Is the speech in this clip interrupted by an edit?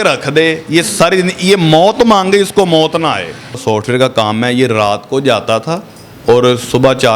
yes; 1 cut; at 3.6 s

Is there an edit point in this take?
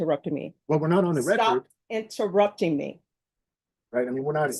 no; 0 cuts

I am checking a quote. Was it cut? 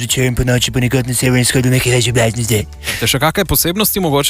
yes; 1 cut; at 3.0 s

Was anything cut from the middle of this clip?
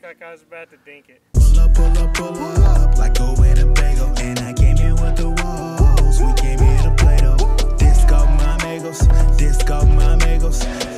yes; 1 cut; at 1.1 s

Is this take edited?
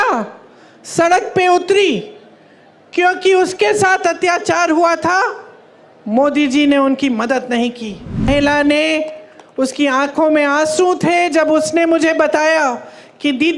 yes; 1 cut; at 8.3 s

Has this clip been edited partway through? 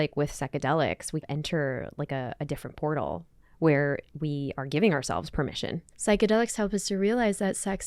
yes; 2 cuts; at 1.2 s, 5.9 s

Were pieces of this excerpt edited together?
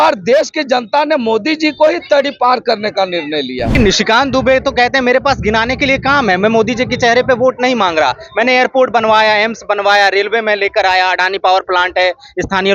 yes; 1 cut; at 3.7 s

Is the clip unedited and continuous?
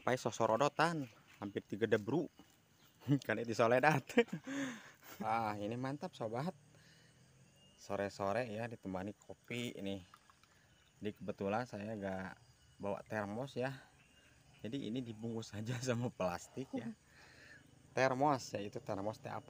no; 1 cut; at 5.0 s

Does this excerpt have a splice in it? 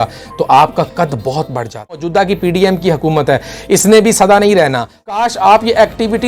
yes; 2 cuts; at 2.0 s, 5.1 s

